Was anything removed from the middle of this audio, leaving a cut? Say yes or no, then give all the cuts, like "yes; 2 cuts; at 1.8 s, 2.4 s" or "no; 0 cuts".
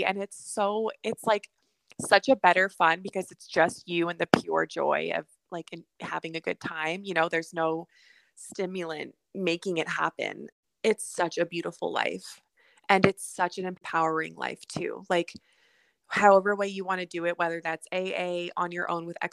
yes; 1 cut; at 10.4 s